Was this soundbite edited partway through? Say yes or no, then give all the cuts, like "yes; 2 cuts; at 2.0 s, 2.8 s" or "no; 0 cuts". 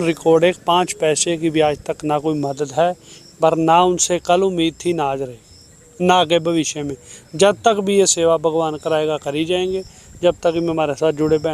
no; 0 cuts